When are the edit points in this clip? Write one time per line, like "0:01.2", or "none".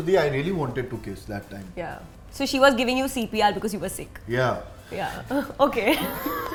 none